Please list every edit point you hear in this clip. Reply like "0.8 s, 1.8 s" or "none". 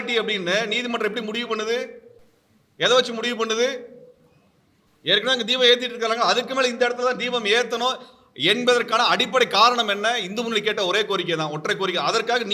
none